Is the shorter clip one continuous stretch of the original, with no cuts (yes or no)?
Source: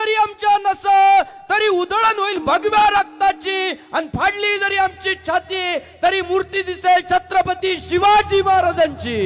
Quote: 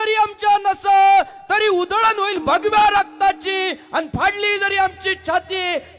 yes